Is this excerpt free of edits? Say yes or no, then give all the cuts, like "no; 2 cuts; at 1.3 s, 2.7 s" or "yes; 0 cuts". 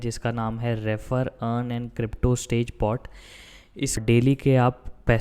no; 1 cut; at 4.0 s